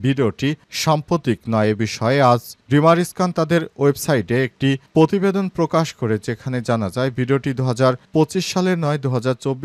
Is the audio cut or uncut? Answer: uncut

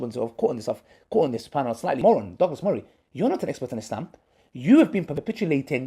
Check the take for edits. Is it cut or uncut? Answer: cut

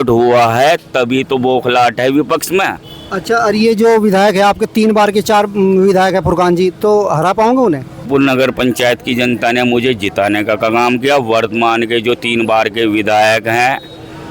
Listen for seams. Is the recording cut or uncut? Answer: cut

